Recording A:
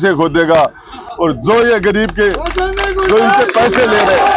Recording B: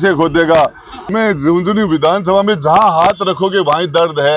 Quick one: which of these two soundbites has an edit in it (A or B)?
B